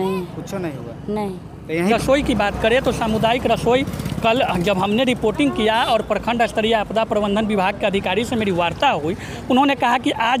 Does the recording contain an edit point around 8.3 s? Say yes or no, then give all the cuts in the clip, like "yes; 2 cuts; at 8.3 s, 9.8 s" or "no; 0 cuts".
no; 1 cut; at 1.9 s